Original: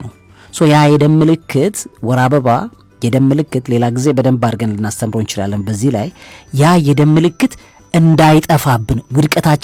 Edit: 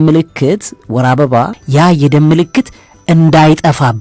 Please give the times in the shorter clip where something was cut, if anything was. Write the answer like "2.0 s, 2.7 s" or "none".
1.6 s